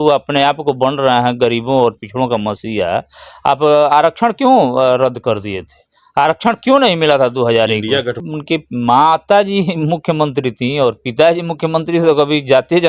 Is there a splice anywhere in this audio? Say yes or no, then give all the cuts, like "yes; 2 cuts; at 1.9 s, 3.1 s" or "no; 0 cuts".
yes; 1 cut; at 8.2 s